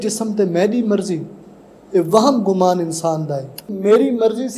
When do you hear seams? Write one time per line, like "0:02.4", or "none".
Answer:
0:03.7

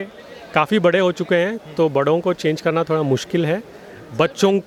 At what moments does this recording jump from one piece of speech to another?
none

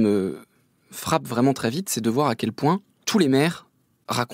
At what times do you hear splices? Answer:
none

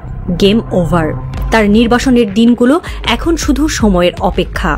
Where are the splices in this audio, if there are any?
none

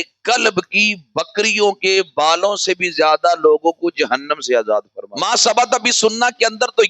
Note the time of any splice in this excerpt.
0:05.0

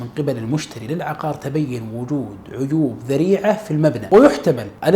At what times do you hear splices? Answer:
0:04.0

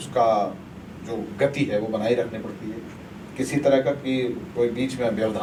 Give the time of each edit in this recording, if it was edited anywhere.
none

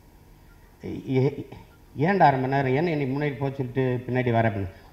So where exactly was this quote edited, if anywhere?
none

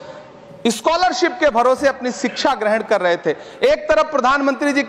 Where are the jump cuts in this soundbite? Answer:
none

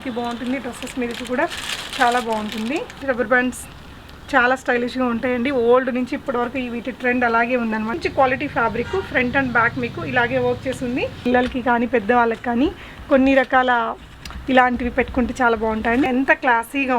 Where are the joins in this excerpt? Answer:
0:03.0
0:08.0
0:11.2
0:16.1

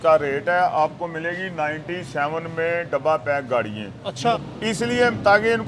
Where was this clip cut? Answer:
0:04.3

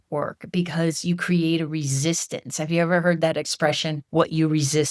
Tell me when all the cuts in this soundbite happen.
0:03.9

